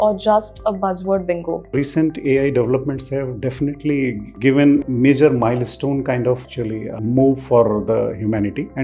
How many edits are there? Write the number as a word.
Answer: one